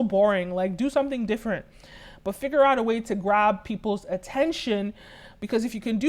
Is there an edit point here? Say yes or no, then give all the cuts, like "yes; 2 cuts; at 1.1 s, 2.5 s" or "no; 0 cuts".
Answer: no; 0 cuts